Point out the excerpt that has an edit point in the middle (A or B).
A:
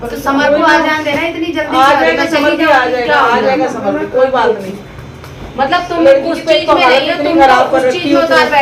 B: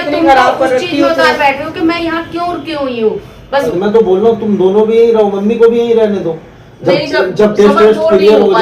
B